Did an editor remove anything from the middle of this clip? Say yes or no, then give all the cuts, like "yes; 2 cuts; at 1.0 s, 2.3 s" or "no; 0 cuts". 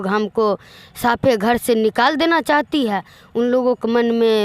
no; 0 cuts